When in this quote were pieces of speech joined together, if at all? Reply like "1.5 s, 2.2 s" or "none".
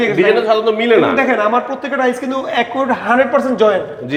none

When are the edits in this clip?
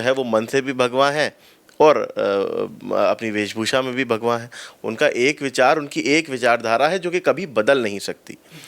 none

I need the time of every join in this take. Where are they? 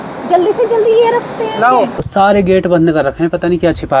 2.0 s

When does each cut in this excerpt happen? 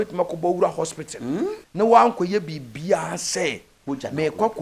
1.6 s

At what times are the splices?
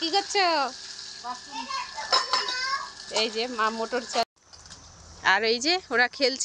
4.3 s

